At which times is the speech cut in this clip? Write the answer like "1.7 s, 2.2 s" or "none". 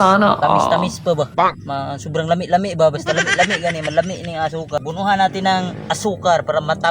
4.8 s

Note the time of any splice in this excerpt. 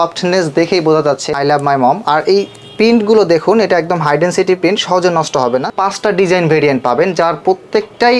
1.2 s, 5.7 s

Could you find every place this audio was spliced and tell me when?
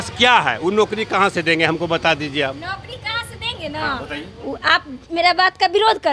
none

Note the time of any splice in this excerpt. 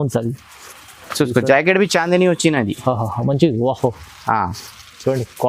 none

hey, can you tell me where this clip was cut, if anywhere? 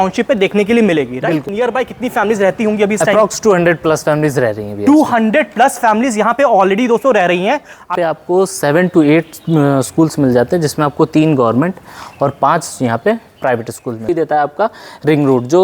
1.5 s, 7.9 s, 14.1 s

